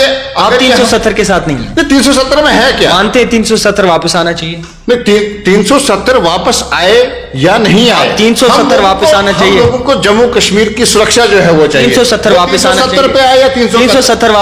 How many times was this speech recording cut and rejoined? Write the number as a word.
zero